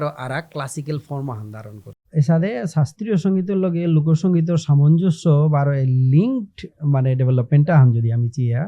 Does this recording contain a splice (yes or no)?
yes